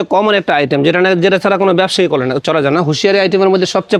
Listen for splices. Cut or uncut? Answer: uncut